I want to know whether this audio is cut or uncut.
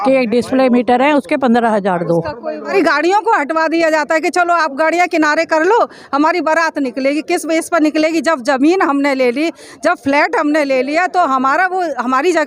cut